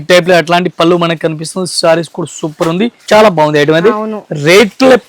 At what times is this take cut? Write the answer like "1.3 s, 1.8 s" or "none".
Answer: 3.0 s